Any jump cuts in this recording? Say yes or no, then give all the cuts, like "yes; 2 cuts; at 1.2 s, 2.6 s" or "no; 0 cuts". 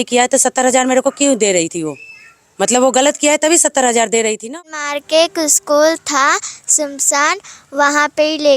yes; 1 cut; at 4.5 s